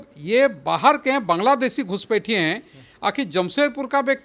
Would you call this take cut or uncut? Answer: uncut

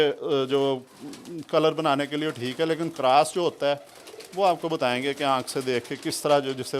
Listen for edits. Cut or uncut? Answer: uncut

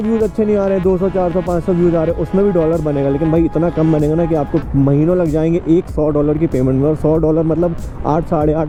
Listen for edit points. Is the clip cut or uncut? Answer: uncut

